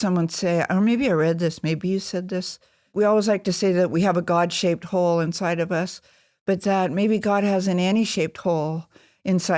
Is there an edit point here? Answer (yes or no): yes